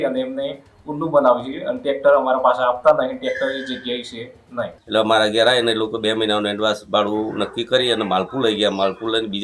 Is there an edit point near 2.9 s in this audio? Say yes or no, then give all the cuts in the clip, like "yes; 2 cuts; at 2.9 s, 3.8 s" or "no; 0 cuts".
no; 1 cut; at 4.8 s